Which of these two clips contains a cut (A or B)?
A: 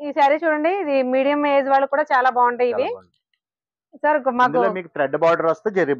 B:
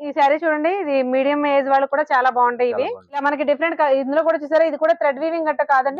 B